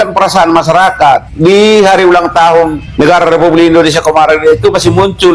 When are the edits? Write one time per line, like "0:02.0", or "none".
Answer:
0:01.3
0:02.8